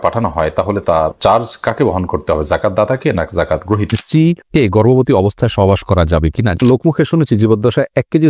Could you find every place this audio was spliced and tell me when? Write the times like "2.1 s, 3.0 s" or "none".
4.2 s, 6.6 s